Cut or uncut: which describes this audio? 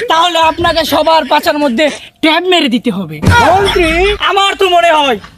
cut